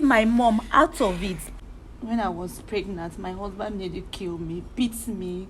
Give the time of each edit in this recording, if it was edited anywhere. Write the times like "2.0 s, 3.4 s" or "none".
1.4 s